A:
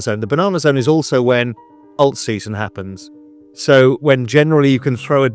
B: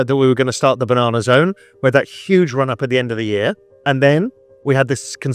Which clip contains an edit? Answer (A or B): B